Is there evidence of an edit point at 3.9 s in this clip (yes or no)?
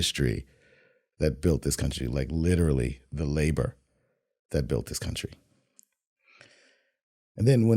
no